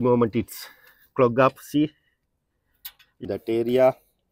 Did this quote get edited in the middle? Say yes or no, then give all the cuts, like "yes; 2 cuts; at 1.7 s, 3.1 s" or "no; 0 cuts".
yes; 1 cut; at 3.2 s